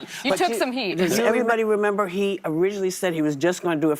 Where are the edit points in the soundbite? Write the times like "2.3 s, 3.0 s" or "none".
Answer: 1.1 s